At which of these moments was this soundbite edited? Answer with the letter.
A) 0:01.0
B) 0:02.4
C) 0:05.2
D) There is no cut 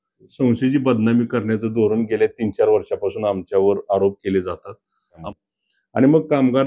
C